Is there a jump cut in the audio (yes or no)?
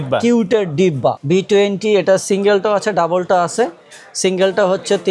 yes